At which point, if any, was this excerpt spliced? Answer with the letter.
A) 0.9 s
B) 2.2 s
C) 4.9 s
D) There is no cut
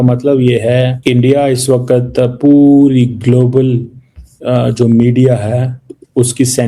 A